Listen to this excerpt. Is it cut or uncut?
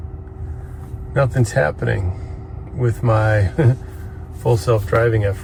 uncut